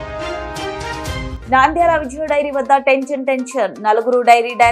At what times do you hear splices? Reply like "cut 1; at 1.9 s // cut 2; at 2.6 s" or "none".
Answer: cut 1; at 1.3 s